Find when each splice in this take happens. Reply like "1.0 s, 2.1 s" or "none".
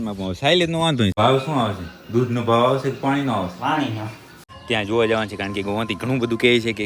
1.2 s, 4.2 s